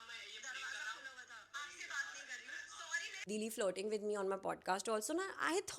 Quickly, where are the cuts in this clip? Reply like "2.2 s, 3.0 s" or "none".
1.5 s, 3.3 s